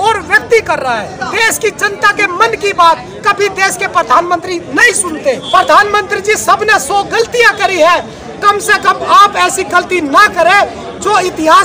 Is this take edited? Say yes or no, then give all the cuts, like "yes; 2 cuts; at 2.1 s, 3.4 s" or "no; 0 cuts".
yes; 2 cuts; at 1.2 s, 5.4 s